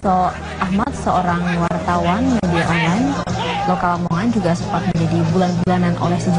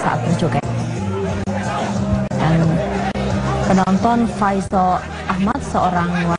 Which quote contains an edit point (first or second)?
second